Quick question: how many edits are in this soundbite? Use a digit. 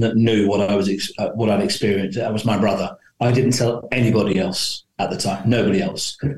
0